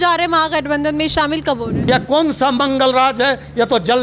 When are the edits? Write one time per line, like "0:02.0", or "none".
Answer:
0:01.8